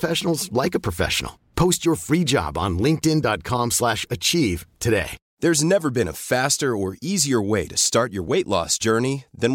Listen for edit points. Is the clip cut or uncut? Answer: uncut